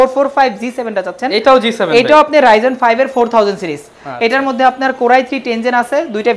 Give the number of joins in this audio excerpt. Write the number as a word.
zero